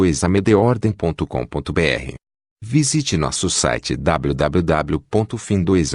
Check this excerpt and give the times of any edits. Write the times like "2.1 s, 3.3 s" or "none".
1.2 s